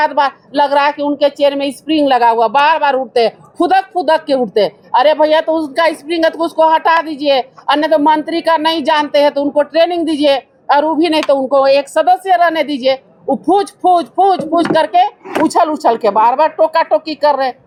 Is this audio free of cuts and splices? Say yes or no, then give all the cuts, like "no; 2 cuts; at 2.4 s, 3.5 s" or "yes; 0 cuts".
yes; 0 cuts